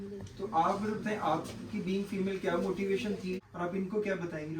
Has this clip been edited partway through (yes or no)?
yes